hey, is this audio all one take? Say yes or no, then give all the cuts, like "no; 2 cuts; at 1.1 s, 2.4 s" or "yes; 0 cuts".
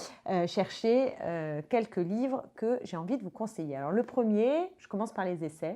yes; 0 cuts